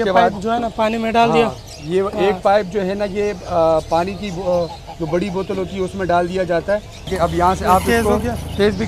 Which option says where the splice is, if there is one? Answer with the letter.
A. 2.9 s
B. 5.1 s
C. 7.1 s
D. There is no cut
C